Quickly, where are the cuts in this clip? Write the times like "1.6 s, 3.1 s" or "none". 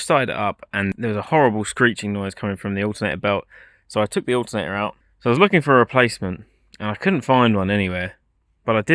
0.9 s, 5.0 s